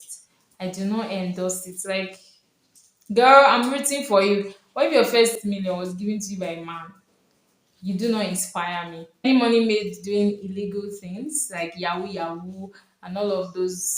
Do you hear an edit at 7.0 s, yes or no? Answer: no